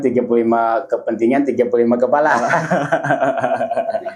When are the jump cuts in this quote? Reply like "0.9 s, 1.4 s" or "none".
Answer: none

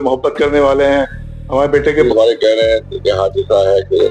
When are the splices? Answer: 2.1 s

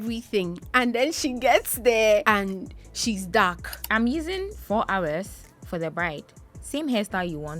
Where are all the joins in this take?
2.2 s, 3.7 s

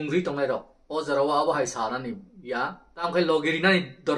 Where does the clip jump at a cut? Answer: 2.8 s

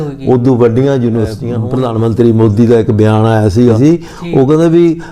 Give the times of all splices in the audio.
1.5 s, 3.8 s

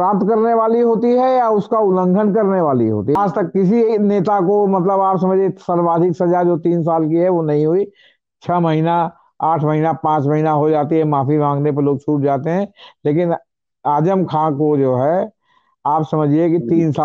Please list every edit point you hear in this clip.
3.1 s

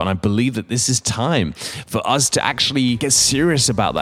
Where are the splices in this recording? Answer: 3.0 s

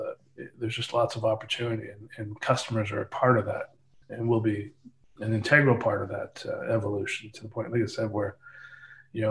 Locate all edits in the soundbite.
none

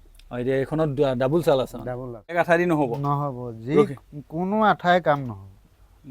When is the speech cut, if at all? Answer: 2.3 s

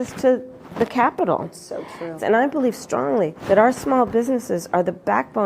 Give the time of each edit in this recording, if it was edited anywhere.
3.4 s

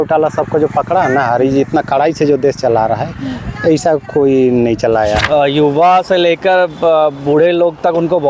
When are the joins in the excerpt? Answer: 5.2 s

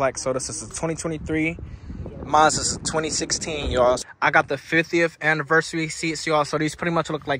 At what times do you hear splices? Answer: 4.0 s

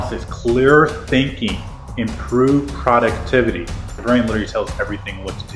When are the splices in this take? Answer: 4.0 s

